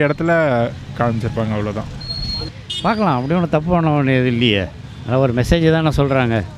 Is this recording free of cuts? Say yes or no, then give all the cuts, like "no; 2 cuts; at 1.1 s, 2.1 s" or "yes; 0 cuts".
yes; 0 cuts